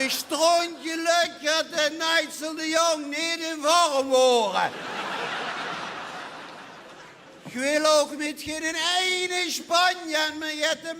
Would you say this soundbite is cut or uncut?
cut